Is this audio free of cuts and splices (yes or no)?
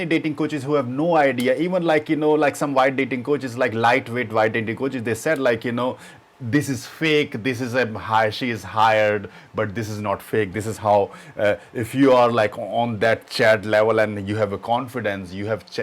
yes